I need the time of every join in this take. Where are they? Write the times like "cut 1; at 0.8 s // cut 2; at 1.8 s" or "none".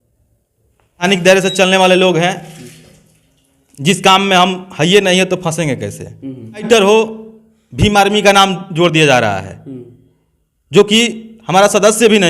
cut 1; at 1.0 s // cut 2; at 6.7 s